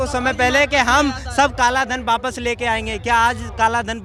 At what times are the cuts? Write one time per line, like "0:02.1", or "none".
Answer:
none